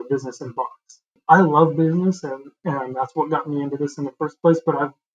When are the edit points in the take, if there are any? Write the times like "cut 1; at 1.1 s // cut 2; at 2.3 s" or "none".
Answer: cut 1; at 1.1 s